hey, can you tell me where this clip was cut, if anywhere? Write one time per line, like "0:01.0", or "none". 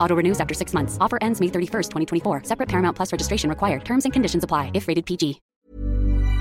0:05.5